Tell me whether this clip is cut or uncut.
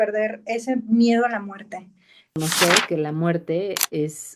cut